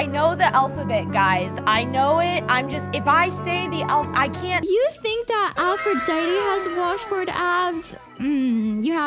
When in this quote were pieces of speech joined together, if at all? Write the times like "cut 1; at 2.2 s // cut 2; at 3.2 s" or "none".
cut 1; at 4.6 s